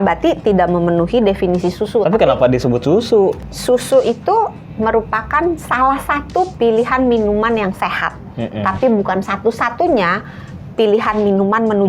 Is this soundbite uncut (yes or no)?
no